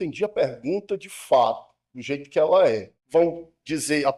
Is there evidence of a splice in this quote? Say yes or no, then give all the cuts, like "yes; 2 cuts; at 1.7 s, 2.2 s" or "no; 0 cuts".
yes; 1 cut; at 2.9 s